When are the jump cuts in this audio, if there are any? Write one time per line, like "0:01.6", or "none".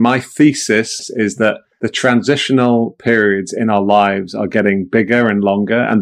0:00.9
0:01.7